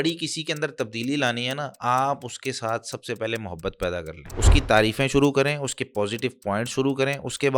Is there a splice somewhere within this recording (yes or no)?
yes